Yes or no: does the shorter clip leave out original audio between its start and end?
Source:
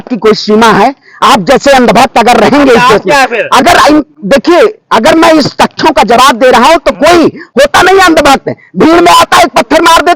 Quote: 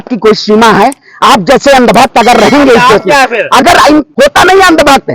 yes